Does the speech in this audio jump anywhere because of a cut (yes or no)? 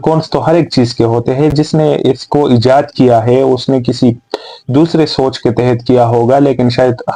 no